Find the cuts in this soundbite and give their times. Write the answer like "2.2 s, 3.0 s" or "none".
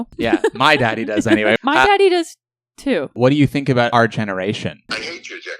1.6 s, 3.1 s